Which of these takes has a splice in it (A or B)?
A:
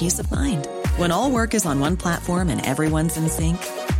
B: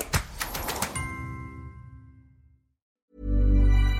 B